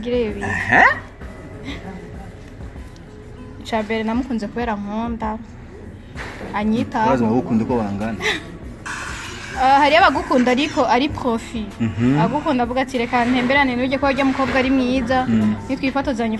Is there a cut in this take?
no; 0 cuts

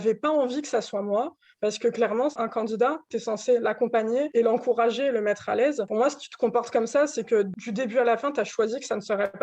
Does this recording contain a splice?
yes; 4 cuts; at 2.4 s, 4.3 s, 5.8 s, 7.6 s

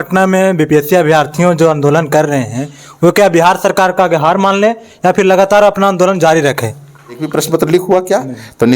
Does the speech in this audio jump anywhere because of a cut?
yes; 1 cut; at 7.2 s

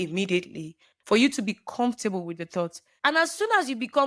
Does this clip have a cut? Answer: yes; 1 cut; at 2.9 s

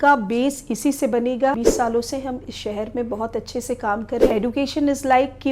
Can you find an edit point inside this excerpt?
yes; 2 cuts; at 1.5 s, 4.3 s

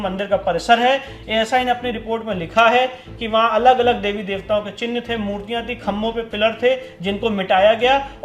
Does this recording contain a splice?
no; 0 cuts

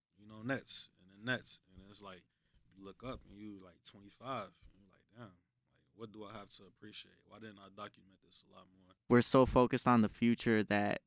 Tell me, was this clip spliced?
yes; 1 cut; at 8.8 s

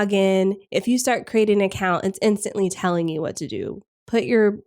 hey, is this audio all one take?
yes; 0 cuts

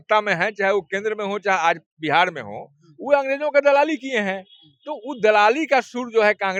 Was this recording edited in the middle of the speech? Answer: no; 0 cuts

